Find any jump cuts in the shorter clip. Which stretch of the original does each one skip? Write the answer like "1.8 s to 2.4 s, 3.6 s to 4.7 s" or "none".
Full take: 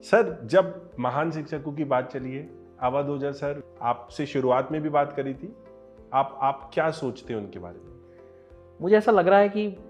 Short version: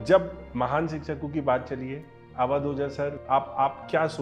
3.6 s to 6.0 s